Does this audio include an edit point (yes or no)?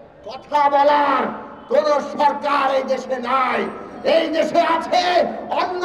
no